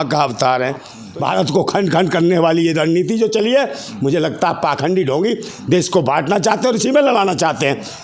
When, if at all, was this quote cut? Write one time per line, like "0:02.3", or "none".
0:01.0